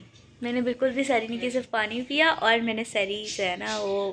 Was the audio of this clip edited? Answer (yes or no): no